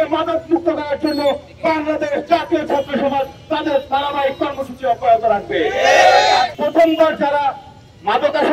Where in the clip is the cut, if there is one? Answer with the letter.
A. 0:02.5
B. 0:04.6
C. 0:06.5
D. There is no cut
C